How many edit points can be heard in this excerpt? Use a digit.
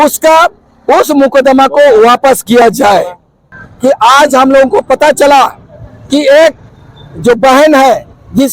1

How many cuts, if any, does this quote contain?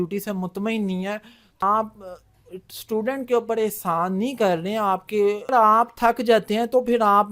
2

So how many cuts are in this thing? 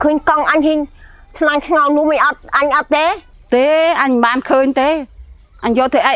0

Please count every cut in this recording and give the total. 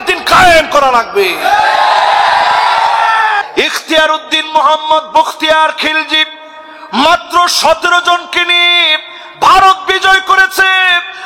1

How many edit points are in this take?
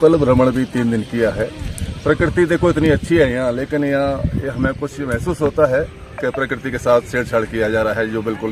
0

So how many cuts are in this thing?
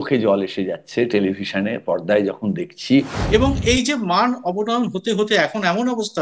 1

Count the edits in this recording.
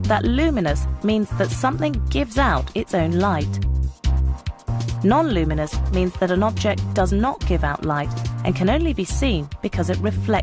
0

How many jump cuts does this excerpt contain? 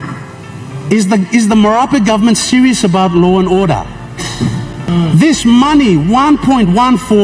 1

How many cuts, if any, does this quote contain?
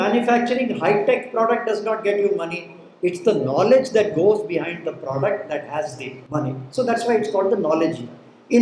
1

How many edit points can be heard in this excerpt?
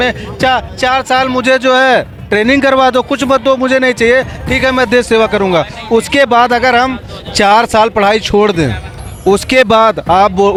0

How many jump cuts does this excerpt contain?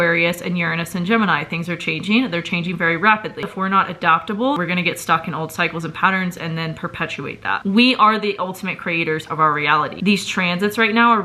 3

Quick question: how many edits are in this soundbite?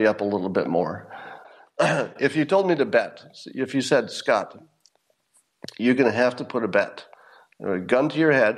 1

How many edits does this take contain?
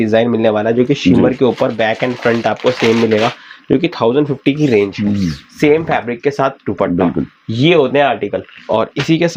0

